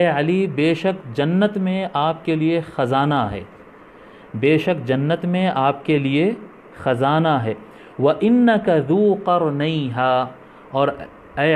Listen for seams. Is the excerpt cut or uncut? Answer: uncut